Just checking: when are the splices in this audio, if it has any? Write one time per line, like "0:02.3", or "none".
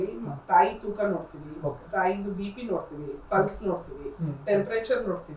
none